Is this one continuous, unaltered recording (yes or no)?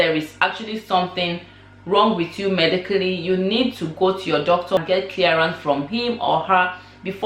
no